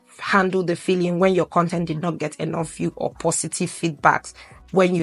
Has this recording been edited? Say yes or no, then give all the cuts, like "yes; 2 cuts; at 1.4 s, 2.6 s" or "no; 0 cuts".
no; 0 cuts